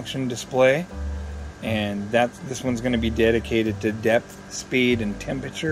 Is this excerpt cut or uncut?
uncut